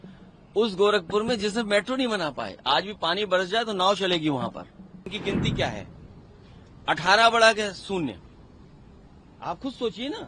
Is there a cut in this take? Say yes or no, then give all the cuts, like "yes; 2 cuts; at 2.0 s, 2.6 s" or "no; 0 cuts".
yes; 1 cut; at 5.1 s